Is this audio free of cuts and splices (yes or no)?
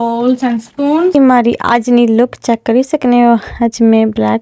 no